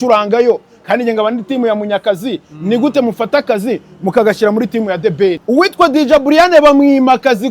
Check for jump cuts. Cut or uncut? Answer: cut